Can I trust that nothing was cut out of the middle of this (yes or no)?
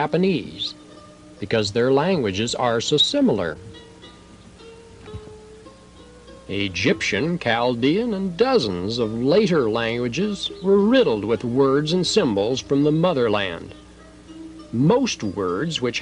yes